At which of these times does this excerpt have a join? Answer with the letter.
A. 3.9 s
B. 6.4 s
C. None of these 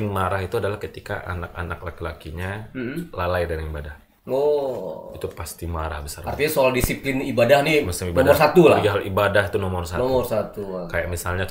C